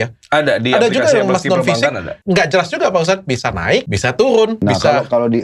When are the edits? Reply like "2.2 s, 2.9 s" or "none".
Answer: 2.1 s, 3.9 s, 4.6 s